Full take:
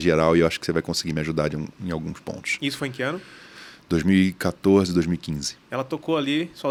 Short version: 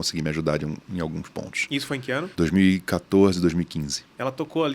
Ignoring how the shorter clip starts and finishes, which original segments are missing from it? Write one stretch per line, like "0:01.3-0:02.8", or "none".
0:03.2-0:03.8